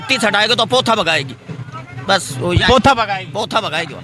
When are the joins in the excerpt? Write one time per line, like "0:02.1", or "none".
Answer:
none